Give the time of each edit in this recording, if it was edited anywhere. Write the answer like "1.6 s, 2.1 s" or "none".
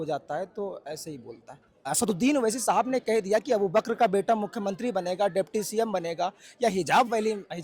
1.7 s